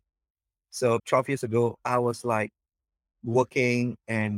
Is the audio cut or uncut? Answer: cut